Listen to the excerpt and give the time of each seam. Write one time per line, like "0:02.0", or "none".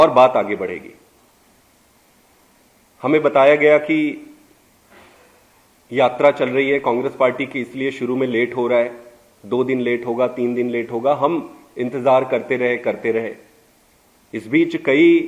none